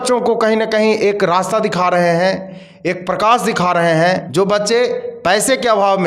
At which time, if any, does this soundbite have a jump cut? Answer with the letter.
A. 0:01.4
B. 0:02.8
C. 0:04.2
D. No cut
C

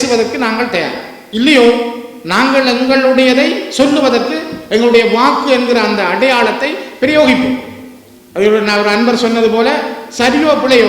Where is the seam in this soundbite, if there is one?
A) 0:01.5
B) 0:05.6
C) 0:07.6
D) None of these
D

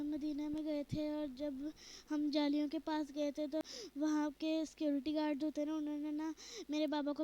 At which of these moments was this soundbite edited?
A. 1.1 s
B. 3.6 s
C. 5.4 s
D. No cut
B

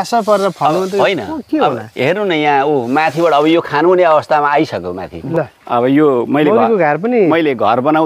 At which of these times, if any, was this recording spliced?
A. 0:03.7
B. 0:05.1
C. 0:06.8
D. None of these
B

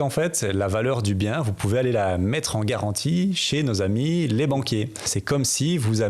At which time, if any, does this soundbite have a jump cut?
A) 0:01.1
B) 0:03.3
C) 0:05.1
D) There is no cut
C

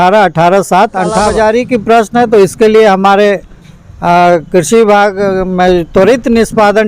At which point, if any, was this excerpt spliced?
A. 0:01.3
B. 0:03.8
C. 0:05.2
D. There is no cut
A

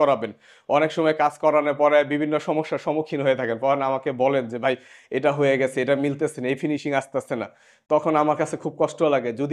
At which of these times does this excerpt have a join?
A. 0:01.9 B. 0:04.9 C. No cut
C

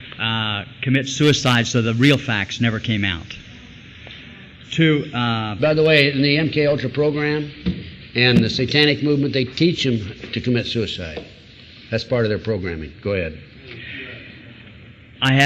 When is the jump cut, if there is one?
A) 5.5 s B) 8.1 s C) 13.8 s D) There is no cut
D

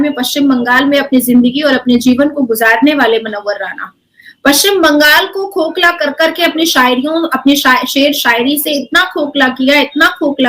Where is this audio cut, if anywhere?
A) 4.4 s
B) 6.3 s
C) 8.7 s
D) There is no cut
D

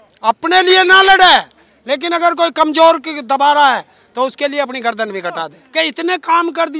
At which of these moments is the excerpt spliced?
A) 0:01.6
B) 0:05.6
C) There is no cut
B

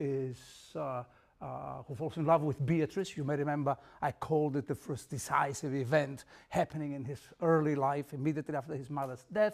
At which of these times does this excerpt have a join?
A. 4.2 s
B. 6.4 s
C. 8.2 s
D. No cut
A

